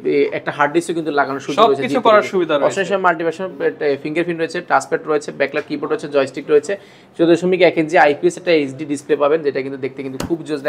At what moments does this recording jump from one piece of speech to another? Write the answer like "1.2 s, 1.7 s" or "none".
none